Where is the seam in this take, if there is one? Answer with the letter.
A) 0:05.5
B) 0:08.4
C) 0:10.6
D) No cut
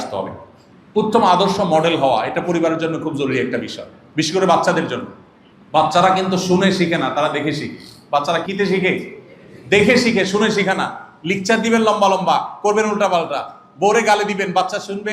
B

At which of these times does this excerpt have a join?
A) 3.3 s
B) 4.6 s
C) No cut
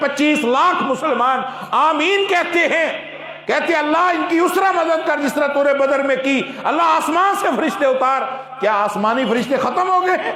C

